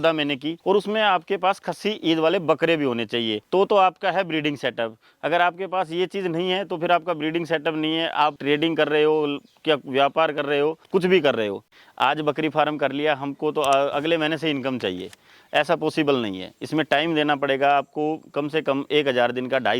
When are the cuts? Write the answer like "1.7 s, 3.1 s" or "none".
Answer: 11.7 s